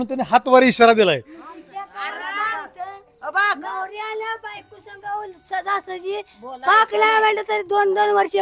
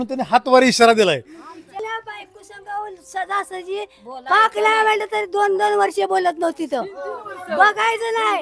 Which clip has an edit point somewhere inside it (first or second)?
second